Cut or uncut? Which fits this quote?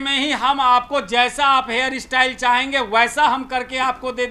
uncut